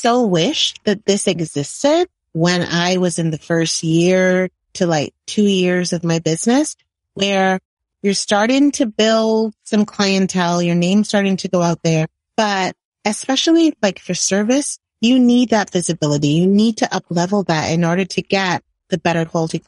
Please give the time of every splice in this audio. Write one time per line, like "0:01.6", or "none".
0:07.8
0:12.2